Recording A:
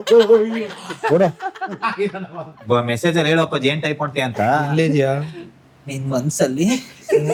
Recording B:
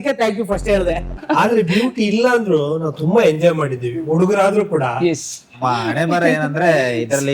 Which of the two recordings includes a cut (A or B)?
B